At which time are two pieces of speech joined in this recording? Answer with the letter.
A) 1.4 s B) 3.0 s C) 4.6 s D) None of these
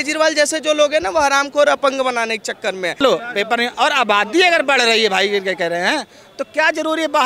B